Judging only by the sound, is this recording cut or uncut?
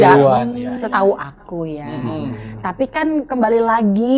uncut